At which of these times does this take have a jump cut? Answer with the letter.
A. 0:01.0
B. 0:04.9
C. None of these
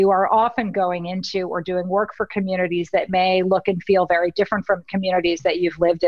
C